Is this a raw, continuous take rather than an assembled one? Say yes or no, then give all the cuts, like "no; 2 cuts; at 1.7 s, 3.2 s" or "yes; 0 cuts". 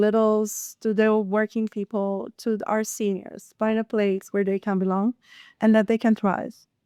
yes; 0 cuts